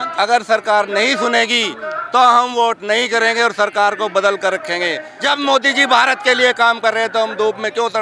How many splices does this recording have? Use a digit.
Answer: 1